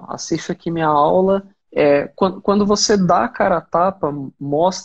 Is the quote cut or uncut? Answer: cut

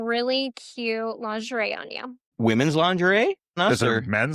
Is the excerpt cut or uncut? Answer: cut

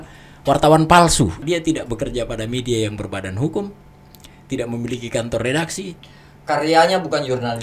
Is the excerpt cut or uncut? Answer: cut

